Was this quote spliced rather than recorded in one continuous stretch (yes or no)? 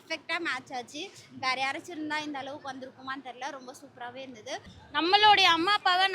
yes